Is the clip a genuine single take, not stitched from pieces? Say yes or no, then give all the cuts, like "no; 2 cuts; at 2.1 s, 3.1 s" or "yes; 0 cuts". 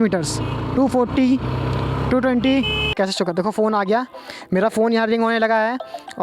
no; 1 cut; at 2.9 s